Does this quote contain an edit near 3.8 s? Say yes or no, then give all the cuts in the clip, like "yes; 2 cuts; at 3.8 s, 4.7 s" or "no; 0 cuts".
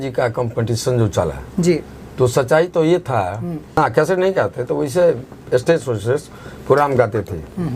yes; 1 cut; at 3.8 s